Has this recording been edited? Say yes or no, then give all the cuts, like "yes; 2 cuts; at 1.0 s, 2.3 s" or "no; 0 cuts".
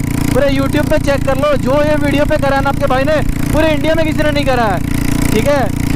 no; 0 cuts